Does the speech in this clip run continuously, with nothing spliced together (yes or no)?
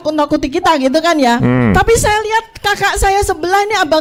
yes